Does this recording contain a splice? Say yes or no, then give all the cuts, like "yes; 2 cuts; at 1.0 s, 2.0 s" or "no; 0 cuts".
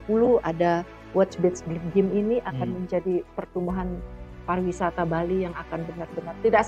no; 0 cuts